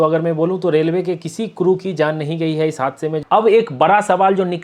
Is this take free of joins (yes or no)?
no